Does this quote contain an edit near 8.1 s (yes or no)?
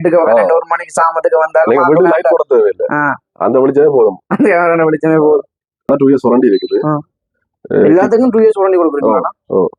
no